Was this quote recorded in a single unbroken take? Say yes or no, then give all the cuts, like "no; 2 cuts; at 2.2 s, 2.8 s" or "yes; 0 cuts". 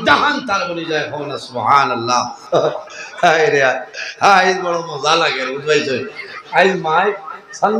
no; 1 cut; at 2.4 s